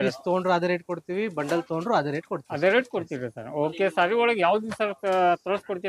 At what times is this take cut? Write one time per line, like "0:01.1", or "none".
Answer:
none